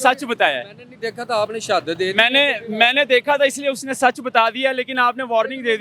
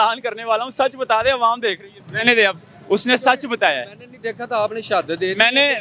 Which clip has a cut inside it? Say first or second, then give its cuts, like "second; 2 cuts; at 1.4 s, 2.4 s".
second; 1 cut; at 1.9 s